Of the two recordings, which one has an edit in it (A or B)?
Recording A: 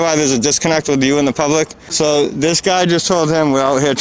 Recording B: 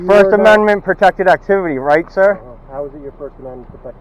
A